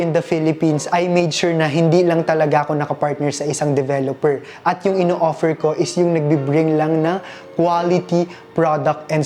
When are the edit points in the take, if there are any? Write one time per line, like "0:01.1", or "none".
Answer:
none